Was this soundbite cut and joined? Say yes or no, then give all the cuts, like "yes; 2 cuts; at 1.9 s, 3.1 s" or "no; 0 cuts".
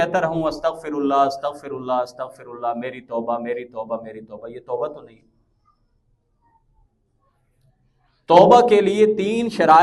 no; 0 cuts